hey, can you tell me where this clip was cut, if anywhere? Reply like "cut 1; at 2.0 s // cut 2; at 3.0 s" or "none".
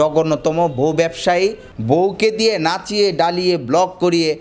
cut 1; at 1.7 s